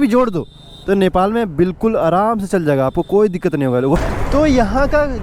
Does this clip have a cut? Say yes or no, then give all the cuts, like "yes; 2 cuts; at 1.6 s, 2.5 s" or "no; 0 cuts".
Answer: yes; 1 cut; at 4.0 s